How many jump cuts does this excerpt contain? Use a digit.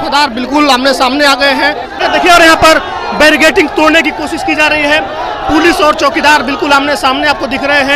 1